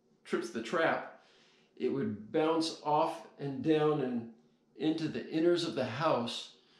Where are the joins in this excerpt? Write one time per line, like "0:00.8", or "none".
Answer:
none